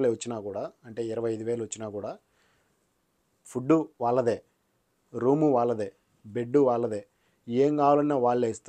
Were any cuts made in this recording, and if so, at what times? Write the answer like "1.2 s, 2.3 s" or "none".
none